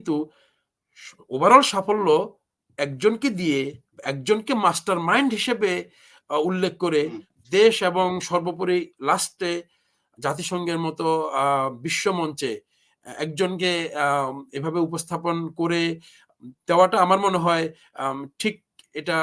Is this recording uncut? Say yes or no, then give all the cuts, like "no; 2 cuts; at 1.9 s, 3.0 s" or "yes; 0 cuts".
yes; 0 cuts